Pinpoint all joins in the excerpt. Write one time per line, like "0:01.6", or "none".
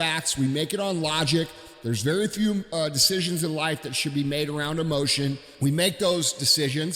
0:05.5